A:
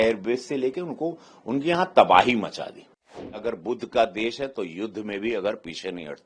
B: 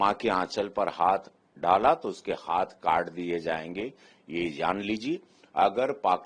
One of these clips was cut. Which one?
A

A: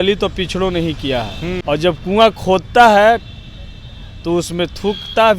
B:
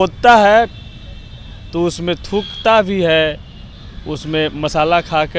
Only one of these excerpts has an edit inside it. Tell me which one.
A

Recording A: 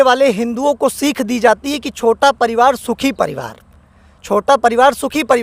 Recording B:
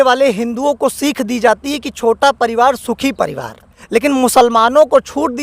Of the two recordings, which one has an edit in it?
B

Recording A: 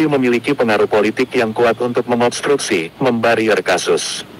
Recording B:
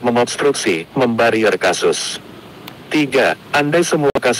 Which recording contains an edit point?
B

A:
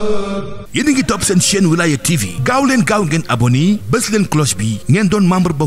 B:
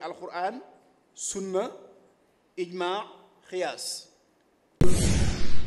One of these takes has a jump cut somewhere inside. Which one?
B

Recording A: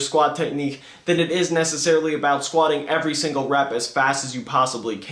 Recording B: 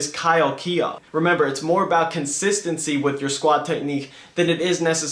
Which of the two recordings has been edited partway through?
B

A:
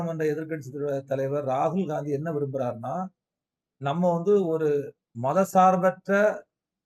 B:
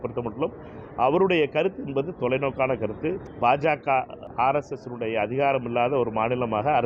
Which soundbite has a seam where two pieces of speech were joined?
B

